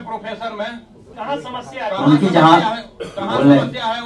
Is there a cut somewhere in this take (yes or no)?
yes